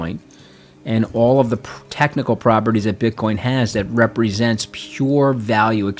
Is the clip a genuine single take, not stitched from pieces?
yes; 0 cuts

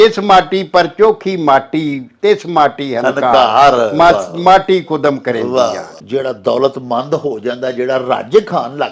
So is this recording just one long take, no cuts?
no; 1 cut; at 6.0 s

